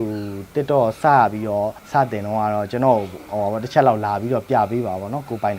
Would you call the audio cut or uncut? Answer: cut